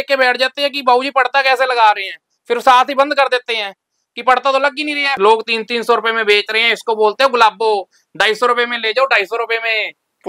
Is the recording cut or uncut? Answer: cut